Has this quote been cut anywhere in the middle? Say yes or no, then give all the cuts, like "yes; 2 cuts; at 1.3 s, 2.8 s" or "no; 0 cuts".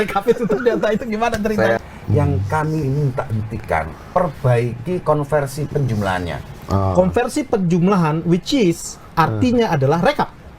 yes; 1 cut; at 1.8 s